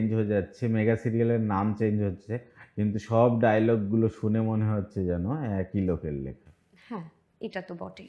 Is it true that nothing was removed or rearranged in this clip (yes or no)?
yes